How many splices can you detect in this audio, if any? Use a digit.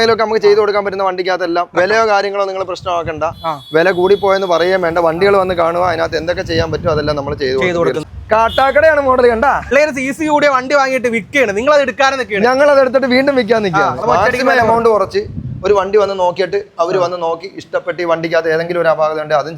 4